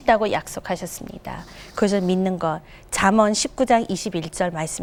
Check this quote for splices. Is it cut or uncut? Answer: uncut